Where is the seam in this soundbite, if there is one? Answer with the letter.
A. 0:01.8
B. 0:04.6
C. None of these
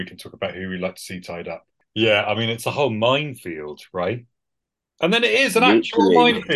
A